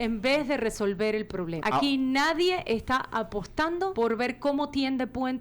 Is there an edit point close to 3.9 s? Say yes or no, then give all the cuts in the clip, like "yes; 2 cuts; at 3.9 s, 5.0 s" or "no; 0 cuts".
yes; 2 cuts; at 1.5 s, 3.9 s